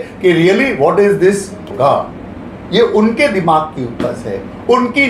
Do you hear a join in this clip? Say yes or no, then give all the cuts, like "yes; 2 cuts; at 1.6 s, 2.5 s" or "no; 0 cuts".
yes; 1 cut; at 1.6 s